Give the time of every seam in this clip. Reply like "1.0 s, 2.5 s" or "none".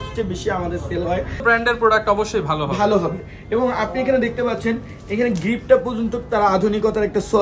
1.4 s